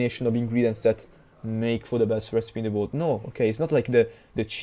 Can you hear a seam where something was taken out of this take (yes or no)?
no